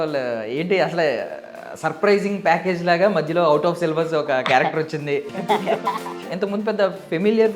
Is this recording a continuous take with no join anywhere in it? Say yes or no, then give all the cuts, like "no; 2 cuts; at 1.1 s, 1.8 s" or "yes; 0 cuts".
no; 2 cuts; at 5.3 s, 6.2 s